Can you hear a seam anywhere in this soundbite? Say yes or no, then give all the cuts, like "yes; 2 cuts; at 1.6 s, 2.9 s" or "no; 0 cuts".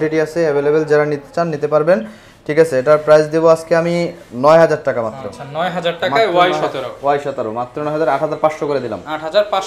no; 0 cuts